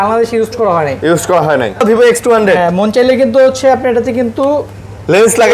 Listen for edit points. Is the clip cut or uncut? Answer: cut